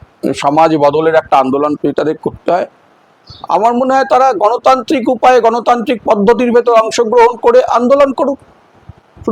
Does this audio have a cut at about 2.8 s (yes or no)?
no